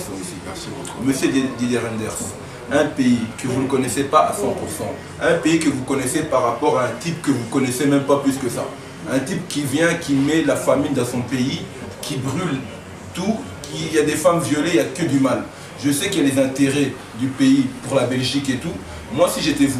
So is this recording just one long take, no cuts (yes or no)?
yes